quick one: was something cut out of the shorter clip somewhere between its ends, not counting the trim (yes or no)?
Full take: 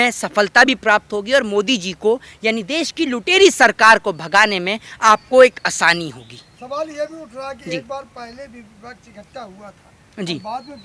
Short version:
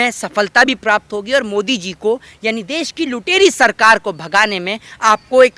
no